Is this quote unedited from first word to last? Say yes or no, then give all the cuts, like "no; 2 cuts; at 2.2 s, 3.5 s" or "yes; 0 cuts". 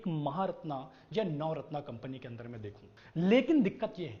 yes; 0 cuts